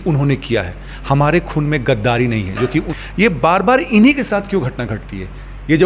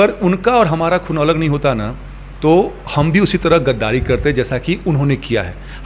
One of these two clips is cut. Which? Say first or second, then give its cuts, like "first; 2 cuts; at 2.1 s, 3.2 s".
first; 1 cut; at 2.9 s